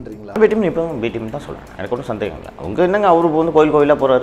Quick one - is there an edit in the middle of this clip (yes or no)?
yes